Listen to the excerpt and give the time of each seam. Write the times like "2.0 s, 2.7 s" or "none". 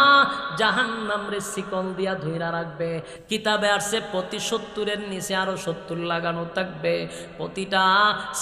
none